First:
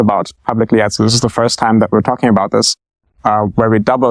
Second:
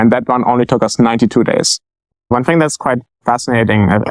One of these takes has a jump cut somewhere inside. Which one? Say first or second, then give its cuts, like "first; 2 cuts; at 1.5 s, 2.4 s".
second; 1 cut; at 2.3 s